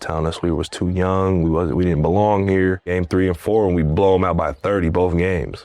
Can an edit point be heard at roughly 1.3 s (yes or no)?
no